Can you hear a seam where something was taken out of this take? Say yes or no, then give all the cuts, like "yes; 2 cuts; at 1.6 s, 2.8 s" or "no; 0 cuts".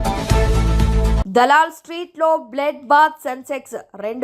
yes; 1 cut; at 1.2 s